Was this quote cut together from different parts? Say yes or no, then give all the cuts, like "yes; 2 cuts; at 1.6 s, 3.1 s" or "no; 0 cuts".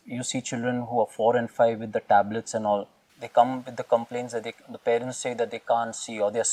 no; 0 cuts